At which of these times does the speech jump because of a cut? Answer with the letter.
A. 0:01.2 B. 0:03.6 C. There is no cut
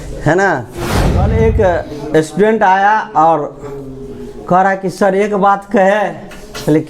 A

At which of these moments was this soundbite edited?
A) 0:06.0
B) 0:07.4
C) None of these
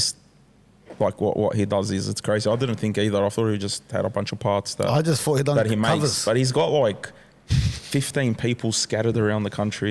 C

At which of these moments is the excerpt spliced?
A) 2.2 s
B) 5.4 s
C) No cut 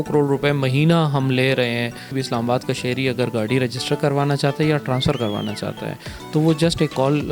A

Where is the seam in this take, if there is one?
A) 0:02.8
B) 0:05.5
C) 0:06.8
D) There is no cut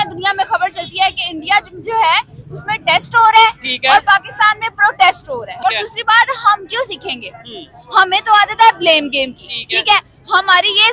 B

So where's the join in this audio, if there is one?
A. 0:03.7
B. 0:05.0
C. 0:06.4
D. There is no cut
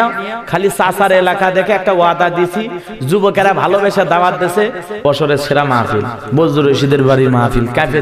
B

